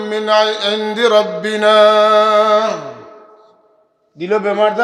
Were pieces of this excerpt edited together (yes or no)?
no